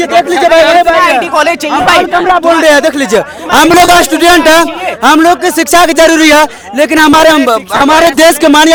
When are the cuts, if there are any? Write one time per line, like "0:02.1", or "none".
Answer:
none